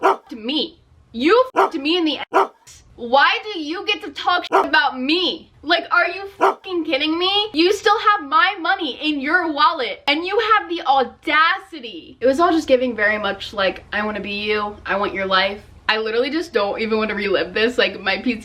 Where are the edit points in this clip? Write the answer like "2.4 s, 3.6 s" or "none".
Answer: 12.1 s, 15.7 s